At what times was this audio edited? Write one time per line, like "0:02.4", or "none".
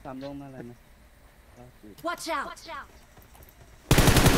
0:01.8
0:02.4